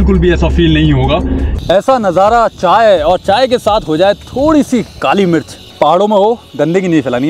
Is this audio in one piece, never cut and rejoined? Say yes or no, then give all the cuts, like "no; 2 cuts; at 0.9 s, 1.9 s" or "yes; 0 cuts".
no; 2 cuts; at 1.5 s, 5.6 s